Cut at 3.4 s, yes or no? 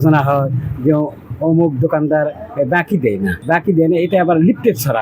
yes